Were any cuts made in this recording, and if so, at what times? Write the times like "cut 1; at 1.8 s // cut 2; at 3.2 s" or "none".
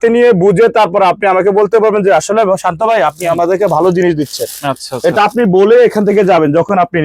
none